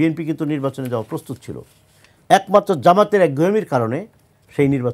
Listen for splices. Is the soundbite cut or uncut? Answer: uncut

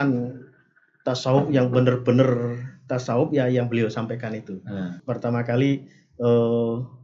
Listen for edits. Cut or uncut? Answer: cut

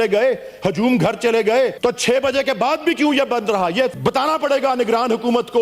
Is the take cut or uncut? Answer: cut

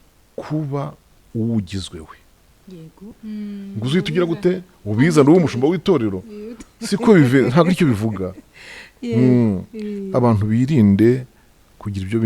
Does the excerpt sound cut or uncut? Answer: cut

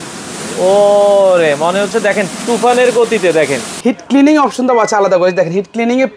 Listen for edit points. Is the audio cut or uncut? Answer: cut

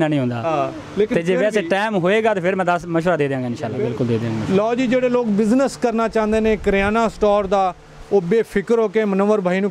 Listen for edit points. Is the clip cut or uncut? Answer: cut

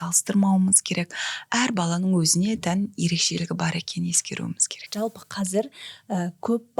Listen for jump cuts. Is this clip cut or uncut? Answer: cut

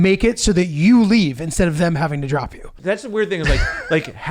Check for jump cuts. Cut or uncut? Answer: cut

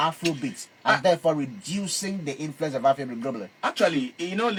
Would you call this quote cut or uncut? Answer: uncut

